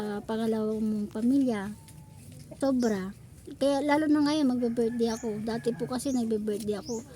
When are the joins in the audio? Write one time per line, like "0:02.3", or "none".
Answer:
0:02.4